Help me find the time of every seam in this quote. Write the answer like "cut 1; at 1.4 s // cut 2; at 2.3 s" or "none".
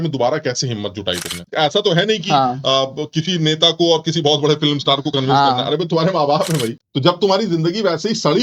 cut 1; at 1.5 s // cut 2; at 6.8 s